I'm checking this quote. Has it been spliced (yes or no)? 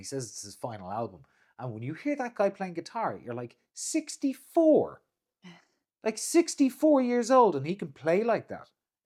no